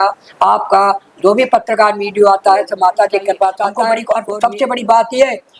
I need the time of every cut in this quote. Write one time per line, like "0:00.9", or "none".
0:04.0